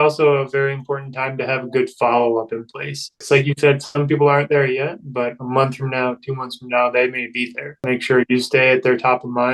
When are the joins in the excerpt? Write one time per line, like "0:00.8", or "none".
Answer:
0:03.2
0:07.9